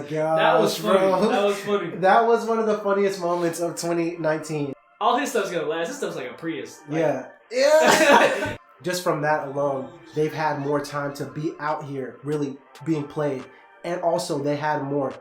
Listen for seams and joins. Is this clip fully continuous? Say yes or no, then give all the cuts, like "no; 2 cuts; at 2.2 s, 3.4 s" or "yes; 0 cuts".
no; 2 cuts; at 4.7 s, 8.6 s